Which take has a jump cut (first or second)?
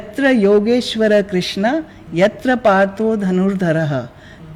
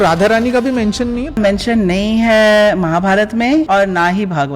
second